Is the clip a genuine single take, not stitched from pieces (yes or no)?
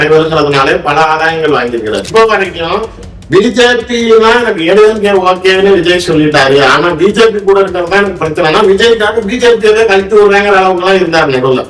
no